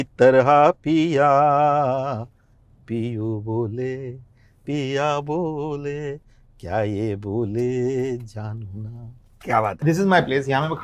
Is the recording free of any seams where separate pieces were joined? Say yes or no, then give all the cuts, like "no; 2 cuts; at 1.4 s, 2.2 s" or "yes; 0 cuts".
no; 1 cut; at 9.8 s